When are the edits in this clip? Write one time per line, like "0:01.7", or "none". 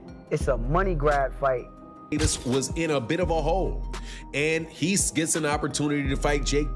0:02.1